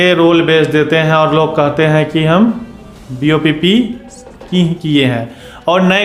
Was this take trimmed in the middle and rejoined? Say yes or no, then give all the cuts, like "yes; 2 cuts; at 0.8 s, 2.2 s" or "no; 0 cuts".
no; 0 cuts